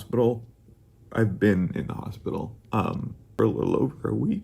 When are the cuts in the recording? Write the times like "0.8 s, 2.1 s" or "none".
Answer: 3.4 s

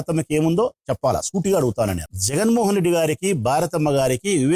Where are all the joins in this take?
2.0 s

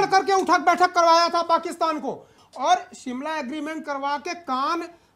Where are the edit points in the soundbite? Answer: 2.4 s

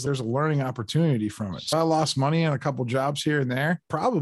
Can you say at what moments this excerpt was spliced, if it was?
1.7 s

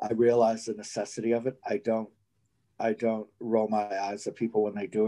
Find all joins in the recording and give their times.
none

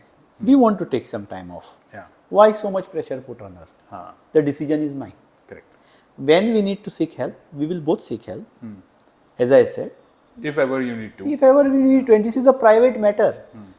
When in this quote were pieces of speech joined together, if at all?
none

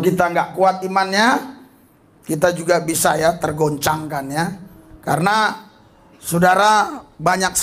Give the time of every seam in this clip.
4.6 s

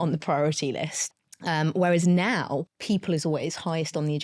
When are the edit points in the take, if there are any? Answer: 1.0 s, 2.7 s

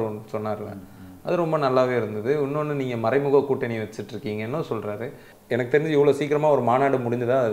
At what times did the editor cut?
5.3 s

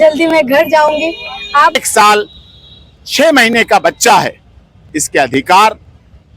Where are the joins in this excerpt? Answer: 1.8 s

